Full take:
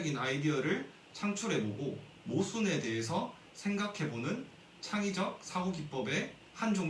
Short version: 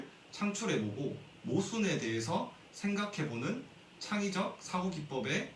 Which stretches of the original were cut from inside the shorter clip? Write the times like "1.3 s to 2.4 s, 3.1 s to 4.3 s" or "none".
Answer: none